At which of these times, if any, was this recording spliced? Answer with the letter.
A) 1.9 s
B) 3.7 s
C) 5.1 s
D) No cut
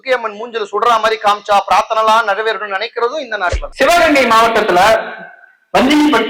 B